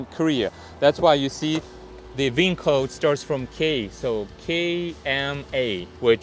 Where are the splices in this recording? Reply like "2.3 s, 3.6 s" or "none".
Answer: none